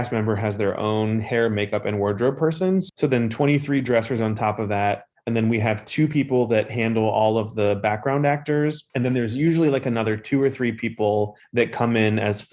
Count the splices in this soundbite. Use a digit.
3